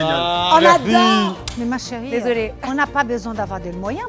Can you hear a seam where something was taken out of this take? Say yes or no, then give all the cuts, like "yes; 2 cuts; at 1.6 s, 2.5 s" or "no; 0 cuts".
yes; 1 cut; at 1.3 s